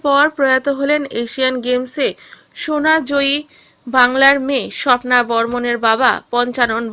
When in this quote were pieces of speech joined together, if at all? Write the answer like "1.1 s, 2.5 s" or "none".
none